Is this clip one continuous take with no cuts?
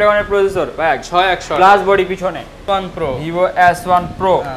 no; 1 cut; at 2.6 s

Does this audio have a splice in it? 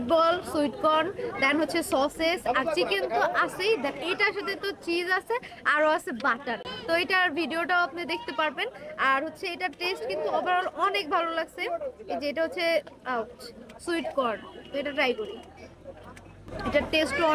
no; 0 cuts

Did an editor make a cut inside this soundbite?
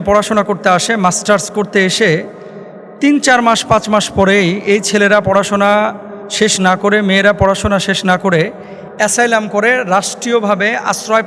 no; 0 cuts

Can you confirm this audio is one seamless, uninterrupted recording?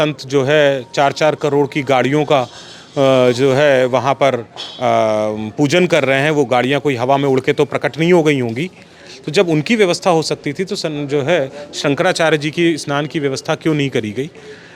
yes; 0 cuts

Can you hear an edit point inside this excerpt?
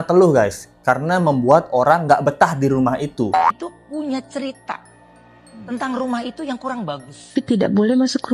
yes; 2 cuts; at 3.6 s, 7.3 s

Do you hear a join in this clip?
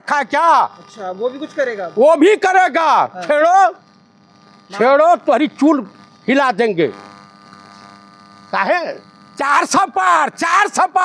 no; 0 cuts

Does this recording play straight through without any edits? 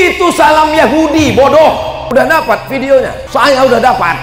no; 2 cuts; at 2.0 s, 3.2 s

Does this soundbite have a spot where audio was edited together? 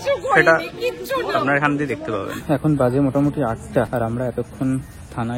yes; 2 cuts; at 2.4 s, 3.9 s

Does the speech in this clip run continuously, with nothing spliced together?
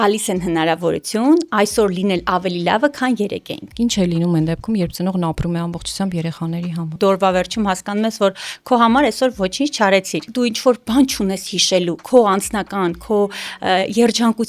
no; 3 cuts; at 3.6 s, 6.9 s, 10.2 s

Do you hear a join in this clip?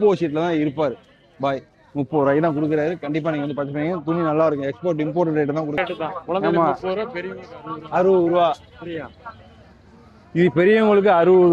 yes; 1 cut; at 5.8 s

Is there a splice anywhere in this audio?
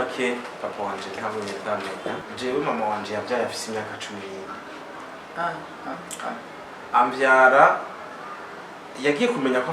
yes; 1 cut; at 2.2 s

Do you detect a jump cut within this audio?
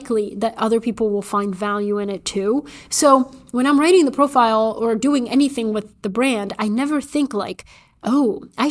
no; 0 cuts

